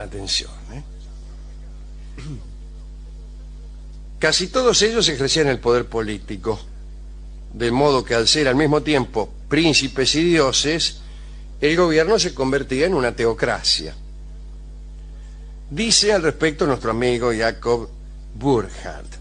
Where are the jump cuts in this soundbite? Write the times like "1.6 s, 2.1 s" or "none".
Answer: none